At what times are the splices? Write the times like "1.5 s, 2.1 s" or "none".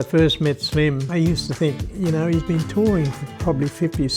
1.0 s, 3.2 s